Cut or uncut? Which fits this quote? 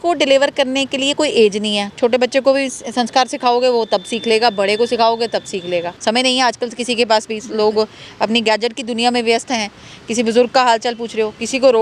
cut